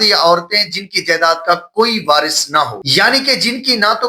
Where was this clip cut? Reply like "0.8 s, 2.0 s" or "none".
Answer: none